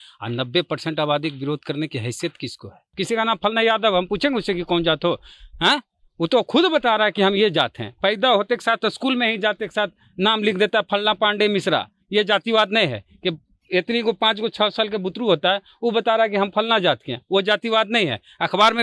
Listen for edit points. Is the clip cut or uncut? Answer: cut